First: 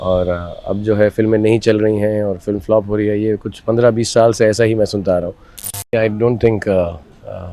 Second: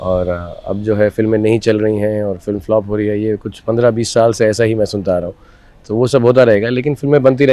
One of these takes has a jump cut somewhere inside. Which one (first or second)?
first